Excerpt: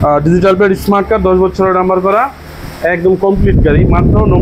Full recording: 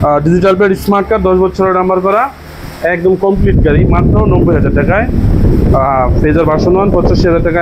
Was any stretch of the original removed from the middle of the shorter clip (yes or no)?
no